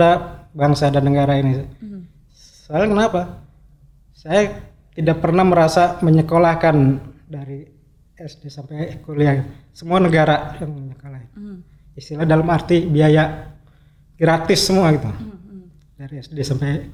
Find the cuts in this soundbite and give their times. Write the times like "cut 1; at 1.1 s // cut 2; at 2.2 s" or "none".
none